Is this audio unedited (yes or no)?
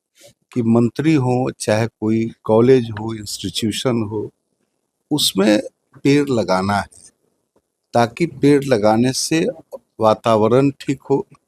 yes